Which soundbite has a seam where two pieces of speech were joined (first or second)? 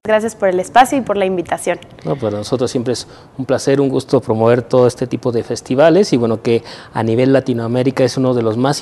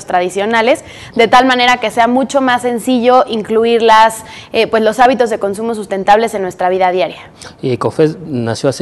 first